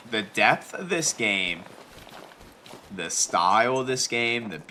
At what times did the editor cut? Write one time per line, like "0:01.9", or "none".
none